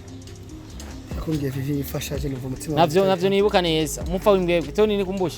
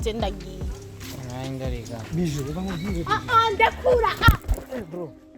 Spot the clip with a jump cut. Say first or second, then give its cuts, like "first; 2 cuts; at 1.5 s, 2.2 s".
first; 1 cut; at 1.2 s